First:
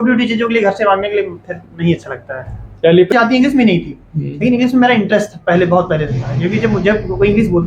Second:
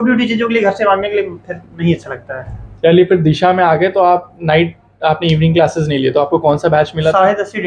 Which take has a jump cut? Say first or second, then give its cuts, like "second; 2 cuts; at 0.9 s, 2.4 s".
first; 1 cut; at 3.1 s